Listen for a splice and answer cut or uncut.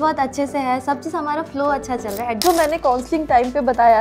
cut